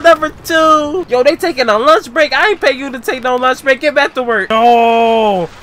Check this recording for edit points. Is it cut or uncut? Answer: cut